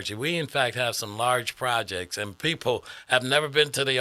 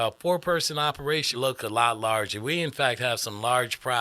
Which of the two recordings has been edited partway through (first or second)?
second